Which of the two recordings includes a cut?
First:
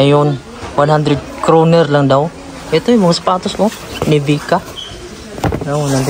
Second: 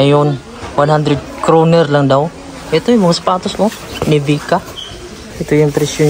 second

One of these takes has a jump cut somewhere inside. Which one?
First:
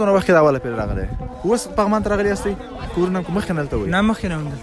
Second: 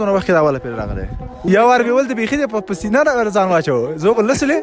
second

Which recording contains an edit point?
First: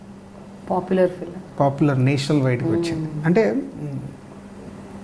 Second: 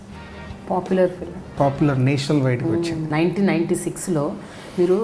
second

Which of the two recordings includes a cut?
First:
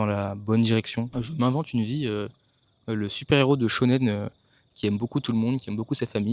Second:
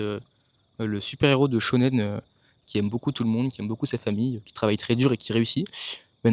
first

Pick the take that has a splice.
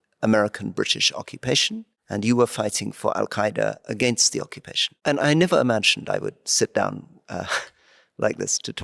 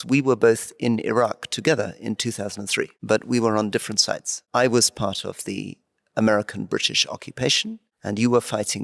second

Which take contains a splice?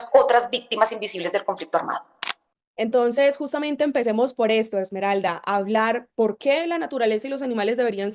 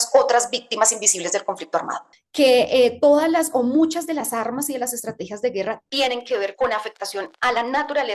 second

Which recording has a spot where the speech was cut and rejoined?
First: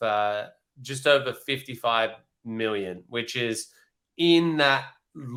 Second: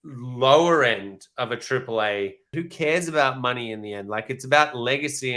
second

